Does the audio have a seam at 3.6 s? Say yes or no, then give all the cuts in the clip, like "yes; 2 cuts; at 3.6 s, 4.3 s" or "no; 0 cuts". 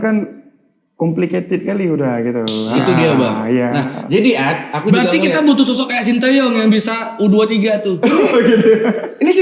no; 0 cuts